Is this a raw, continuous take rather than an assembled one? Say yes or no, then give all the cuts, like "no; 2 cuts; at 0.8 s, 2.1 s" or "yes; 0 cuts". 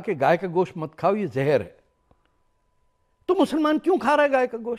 yes; 0 cuts